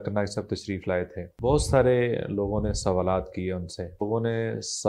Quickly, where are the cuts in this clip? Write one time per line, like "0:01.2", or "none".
0:01.2
0:04.0